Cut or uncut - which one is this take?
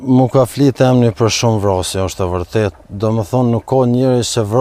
cut